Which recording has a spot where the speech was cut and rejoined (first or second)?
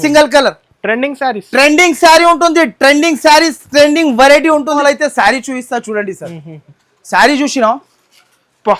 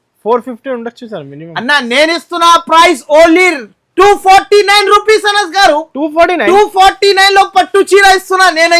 first